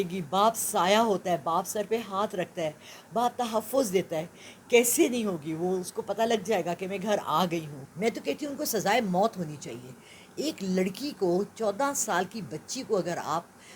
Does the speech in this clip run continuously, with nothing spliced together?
no; 1 cut; at 7.8 s

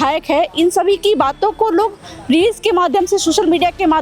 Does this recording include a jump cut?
no; 0 cuts

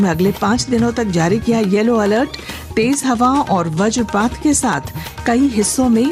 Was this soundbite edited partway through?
no; 0 cuts

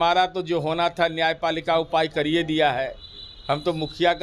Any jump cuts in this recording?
no; 0 cuts

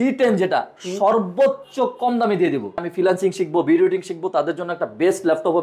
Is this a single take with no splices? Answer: no; 1 cut; at 2.8 s

